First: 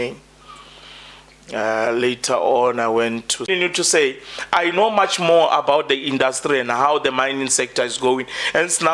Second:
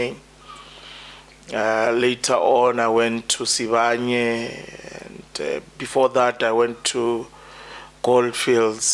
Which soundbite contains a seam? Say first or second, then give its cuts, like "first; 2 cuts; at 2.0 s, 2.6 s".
first; 1 cut; at 3.5 s